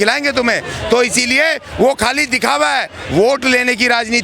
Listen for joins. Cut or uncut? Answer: uncut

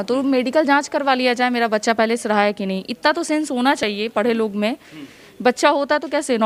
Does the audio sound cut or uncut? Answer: uncut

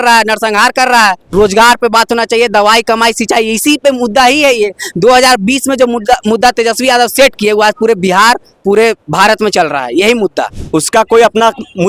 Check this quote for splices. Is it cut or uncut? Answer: cut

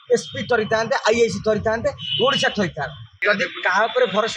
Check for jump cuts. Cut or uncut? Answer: cut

